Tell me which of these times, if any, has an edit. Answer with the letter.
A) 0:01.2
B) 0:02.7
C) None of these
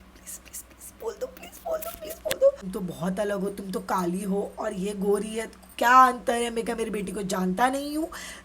B